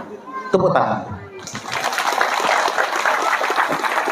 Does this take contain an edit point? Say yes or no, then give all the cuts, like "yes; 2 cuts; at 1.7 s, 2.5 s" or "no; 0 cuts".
no; 0 cuts